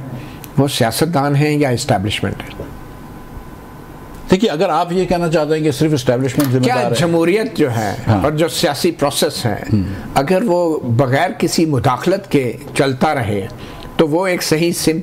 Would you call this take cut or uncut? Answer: cut